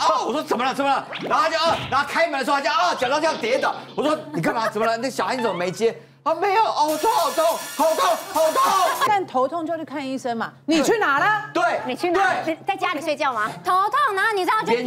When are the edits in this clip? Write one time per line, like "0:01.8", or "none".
0:09.1